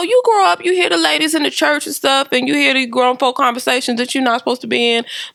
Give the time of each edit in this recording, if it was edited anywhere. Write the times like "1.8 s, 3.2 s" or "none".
none